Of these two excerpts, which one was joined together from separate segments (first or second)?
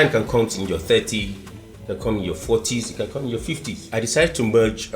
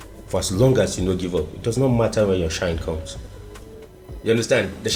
first